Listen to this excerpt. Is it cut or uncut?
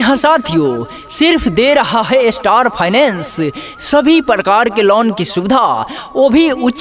uncut